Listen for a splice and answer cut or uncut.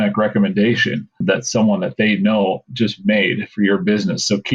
cut